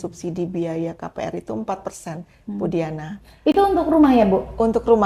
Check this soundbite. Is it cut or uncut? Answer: uncut